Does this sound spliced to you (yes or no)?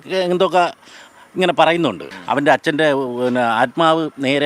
yes